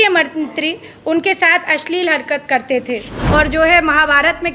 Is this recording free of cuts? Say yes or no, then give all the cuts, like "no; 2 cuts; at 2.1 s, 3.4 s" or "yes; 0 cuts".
no; 1 cut; at 3.1 s